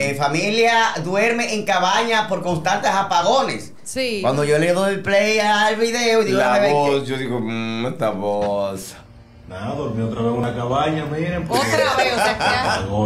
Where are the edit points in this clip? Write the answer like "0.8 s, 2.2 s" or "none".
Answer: none

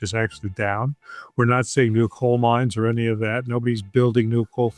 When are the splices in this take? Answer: none

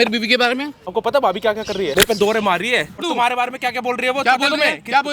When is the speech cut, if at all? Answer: 0.9 s, 1.9 s, 3.0 s

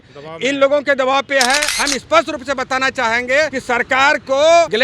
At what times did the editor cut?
1.7 s

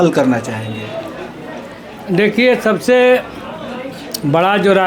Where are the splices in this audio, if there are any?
none

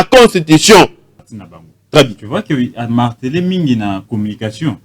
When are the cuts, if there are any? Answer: 1.0 s

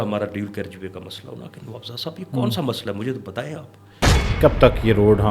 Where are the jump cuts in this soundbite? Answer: 4.2 s

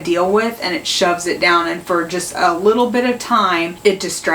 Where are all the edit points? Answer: 2.2 s

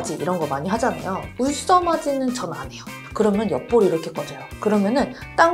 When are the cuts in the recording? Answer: 3.0 s

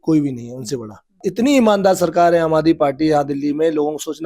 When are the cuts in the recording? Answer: 1.2 s

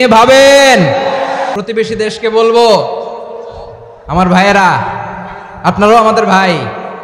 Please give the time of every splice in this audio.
1.5 s

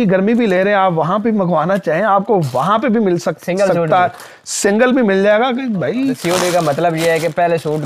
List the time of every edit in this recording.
6.2 s

